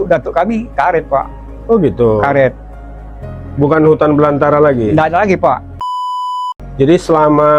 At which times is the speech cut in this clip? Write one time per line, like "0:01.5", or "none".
0:06.3